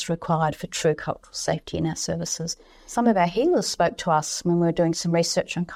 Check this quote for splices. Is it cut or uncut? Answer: uncut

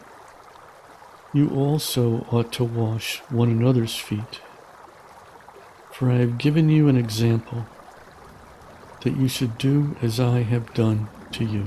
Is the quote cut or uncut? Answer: cut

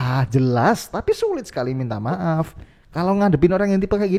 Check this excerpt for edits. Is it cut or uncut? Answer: uncut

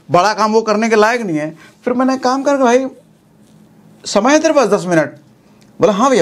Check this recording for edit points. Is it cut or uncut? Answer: uncut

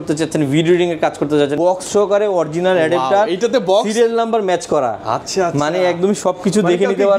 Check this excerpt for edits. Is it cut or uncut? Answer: cut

